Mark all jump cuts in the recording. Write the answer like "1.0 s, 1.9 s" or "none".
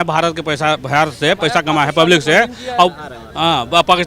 none